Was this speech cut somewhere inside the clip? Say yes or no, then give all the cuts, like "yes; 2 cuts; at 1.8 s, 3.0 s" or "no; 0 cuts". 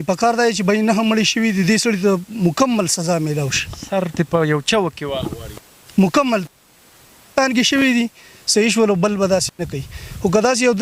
no; 0 cuts